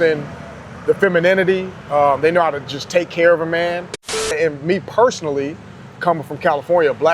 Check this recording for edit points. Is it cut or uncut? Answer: cut